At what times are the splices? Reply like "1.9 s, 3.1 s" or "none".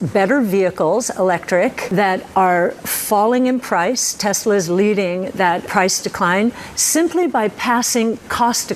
1.9 s, 5.7 s

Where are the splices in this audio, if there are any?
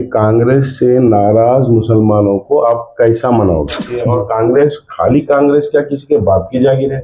4.0 s

